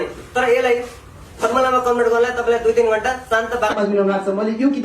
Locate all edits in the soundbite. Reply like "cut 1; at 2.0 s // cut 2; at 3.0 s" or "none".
cut 1; at 3.7 s